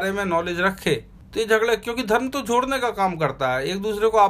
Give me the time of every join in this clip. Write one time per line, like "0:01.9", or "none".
0:01.2